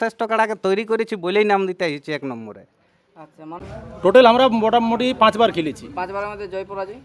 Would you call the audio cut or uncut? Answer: cut